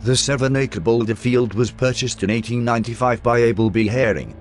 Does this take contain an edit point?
yes; 1 cut; at 3.5 s

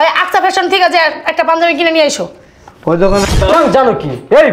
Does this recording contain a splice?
yes; 1 cut; at 3.2 s

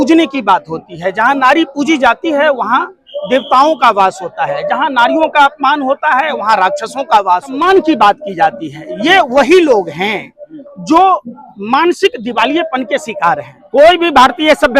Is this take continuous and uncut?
no; 2 cuts; at 7.6 s, 13.5 s

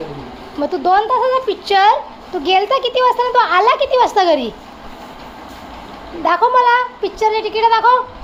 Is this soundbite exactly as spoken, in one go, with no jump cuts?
yes; 0 cuts

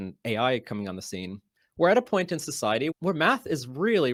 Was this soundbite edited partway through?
no; 0 cuts

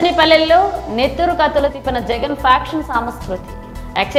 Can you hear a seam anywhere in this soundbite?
no; 0 cuts

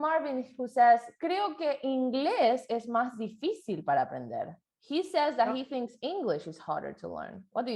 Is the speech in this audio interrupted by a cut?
no; 0 cuts

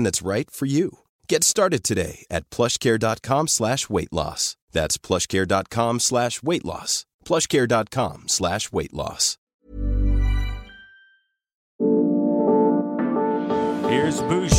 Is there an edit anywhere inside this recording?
yes; 1 cut; at 11.7 s

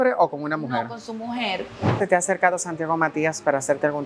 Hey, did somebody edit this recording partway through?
yes; 1 cut; at 2.0 s

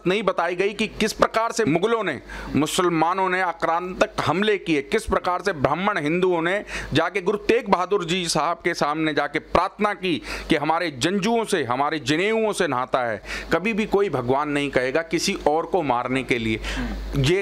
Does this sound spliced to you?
yes; 2 cuts; at 1.7 s, 13.3 s

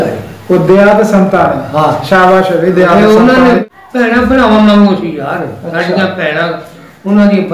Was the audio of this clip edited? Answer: yes; 1 cut; at 3.6 s

